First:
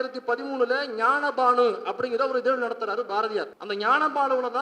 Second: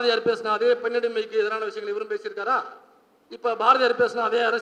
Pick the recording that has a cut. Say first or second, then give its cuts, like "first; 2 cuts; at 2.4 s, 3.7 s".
first; 1 cut; at 3.6 s